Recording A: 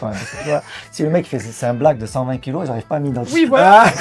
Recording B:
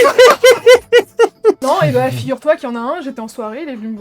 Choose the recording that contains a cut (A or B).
B